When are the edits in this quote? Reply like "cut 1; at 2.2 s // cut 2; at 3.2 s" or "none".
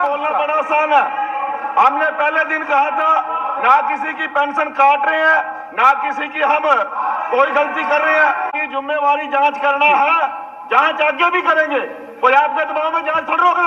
cut 1; at 8.6 s